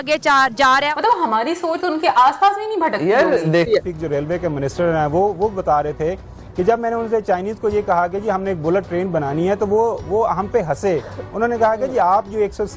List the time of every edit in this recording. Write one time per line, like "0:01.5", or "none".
0:00.9
0:03.7